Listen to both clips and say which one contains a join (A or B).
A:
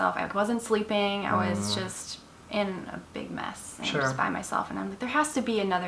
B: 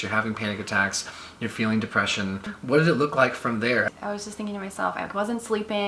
B